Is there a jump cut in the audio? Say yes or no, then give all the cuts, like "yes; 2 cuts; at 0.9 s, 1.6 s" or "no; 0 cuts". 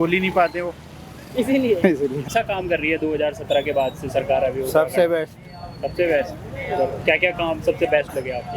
yes; 1 cut; at 2.3 s